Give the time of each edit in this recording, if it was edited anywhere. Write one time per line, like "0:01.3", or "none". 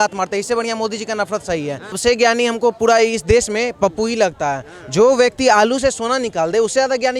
0:01.9